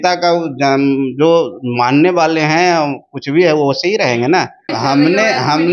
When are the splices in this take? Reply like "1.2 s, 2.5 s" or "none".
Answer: 4.7 s